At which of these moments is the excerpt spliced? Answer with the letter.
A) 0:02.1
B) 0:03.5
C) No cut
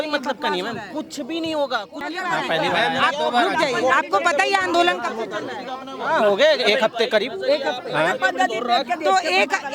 A